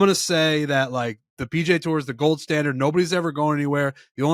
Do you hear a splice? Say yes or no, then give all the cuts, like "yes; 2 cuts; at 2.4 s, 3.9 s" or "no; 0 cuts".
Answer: no; 0 cuts